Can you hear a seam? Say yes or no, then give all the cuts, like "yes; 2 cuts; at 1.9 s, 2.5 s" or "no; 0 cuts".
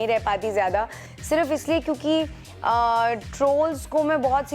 yes; 2 cuts; at 1.1 s, 3.3 s